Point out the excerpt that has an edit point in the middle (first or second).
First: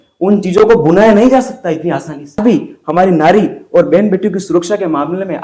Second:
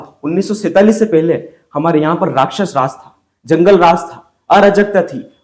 first